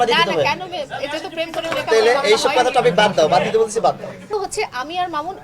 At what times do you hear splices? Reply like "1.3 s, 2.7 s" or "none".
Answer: 4.3 s